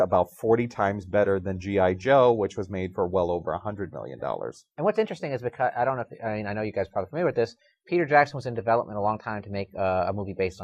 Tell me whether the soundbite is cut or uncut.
cut